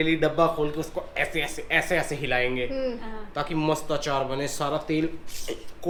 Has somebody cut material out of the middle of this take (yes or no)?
no